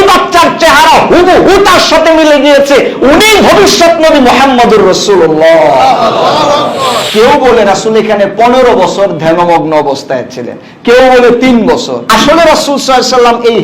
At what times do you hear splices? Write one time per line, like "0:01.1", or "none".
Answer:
0:07.0
0:12.0